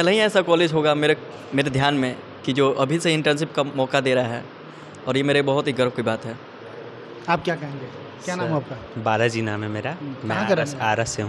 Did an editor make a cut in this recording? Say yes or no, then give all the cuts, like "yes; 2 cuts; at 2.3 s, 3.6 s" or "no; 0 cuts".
no; 0 cuts